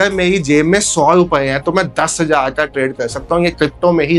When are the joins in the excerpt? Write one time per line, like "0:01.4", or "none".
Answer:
none

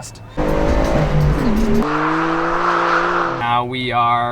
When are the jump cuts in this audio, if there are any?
0:03.4

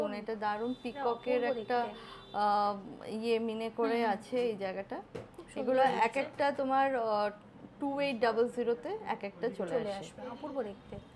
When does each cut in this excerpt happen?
none

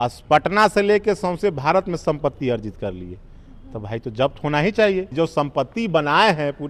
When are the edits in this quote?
0:05.1

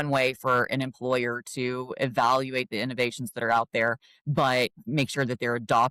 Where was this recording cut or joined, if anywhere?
none

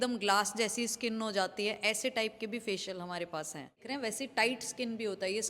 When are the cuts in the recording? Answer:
0:03.8

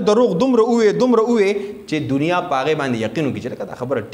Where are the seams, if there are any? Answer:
none

